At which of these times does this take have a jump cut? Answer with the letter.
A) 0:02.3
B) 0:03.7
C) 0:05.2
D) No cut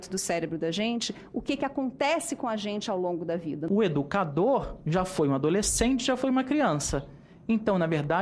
B